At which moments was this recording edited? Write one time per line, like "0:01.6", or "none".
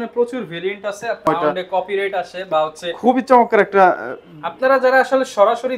0:01.3